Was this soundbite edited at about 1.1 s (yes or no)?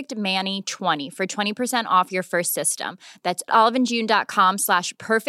yes